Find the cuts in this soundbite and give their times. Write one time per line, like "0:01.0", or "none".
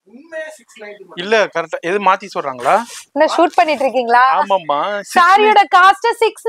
none